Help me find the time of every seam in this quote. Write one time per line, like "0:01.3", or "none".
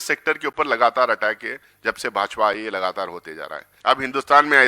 0:03.7